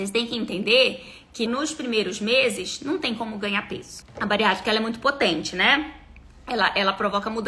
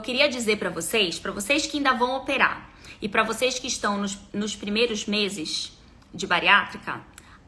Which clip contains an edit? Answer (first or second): first